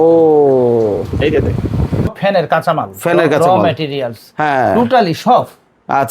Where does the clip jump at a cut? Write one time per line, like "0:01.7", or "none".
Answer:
0:02.1